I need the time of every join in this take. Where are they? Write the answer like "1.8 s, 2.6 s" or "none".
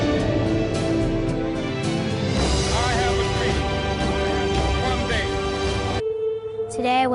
none